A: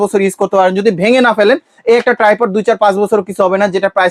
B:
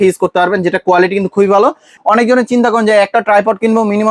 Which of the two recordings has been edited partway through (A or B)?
B